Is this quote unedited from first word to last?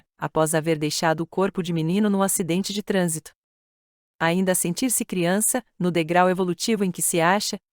no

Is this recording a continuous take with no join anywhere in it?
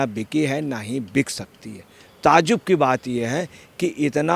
yes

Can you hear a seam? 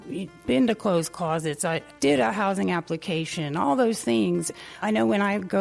yes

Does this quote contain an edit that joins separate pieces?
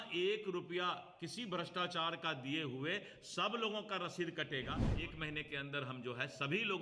yes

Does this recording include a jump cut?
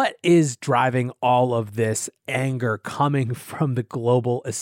no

